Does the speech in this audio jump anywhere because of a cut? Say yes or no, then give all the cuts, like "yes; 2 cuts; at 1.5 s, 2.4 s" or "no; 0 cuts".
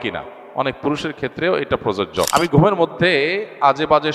yes; 1 cut; at 2.3 s